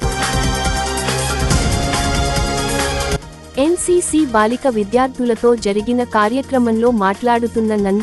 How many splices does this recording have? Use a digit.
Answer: 0